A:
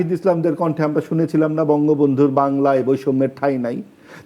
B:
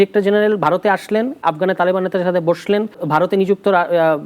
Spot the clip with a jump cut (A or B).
B